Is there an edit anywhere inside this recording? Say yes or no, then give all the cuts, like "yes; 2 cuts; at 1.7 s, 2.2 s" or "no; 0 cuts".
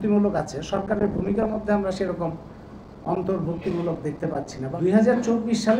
yes; 1 cut; at 4.6 s